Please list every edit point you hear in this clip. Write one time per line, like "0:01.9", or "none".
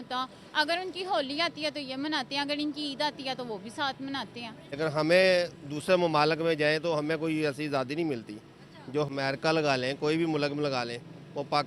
0:04.6
0:09.1